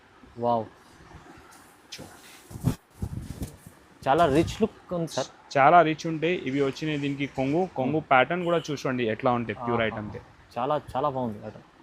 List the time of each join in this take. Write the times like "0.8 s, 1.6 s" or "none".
none